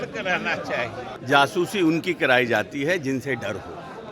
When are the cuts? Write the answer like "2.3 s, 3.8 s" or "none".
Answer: 1.1 s